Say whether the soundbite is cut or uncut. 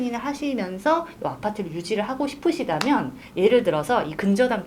uncut